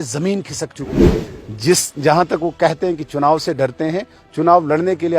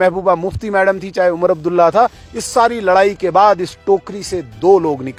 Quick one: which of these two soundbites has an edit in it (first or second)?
first